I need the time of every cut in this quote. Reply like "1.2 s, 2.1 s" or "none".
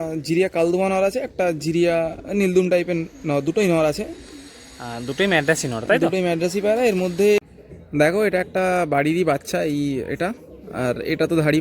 7.4 s